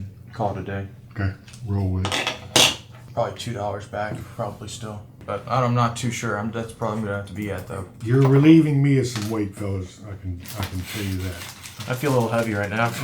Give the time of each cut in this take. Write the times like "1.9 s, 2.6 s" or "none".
2.9 s, 7.9 s